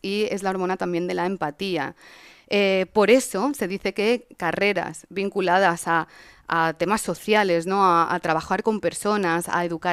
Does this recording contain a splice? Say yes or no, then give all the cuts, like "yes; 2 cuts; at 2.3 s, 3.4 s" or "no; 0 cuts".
no; 0 cuts